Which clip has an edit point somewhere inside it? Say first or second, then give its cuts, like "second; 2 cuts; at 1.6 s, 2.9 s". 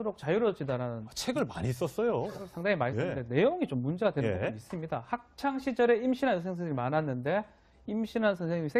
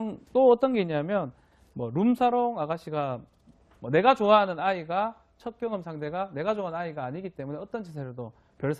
second; 1 cut; at 5.9 s